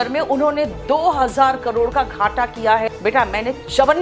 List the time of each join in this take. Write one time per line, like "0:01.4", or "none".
0:02.9